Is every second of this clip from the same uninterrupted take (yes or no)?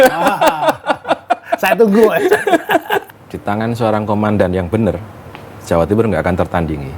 no